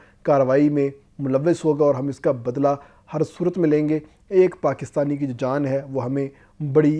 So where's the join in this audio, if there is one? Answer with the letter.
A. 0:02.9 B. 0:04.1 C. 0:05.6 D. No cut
D